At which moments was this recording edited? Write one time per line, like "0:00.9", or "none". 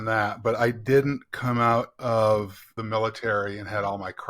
0:02.8